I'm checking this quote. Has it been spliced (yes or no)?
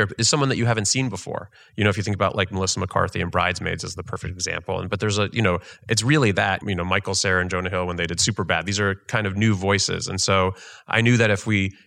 no